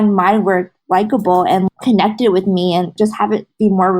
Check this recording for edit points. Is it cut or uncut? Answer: cut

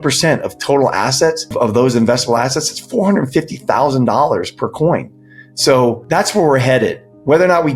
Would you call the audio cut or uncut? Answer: cut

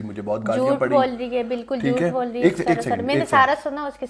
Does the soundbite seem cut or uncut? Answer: uncut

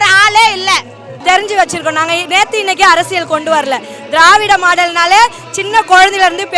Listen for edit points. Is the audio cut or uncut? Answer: cut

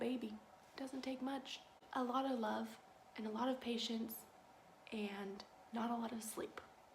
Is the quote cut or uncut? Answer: cut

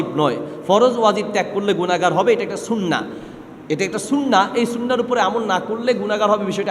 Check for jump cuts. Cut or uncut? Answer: uncut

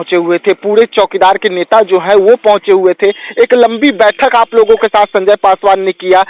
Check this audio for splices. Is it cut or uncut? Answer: uncut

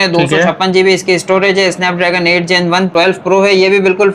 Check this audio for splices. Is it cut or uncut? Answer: cut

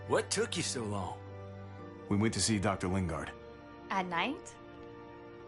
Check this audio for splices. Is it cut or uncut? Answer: cut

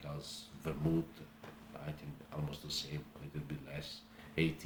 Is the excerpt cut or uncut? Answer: uncut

